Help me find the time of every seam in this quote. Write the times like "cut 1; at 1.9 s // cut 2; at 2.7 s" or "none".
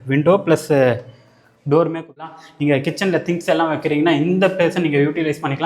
cut 1; at 2.4 s